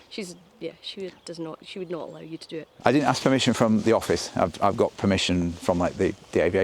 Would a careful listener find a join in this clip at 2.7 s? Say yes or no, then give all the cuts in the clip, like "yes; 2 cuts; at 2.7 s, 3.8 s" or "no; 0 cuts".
yes; 1 cut; at 2.7 s